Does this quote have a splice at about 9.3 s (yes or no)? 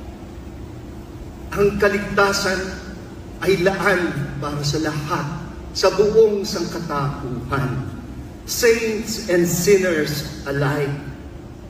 no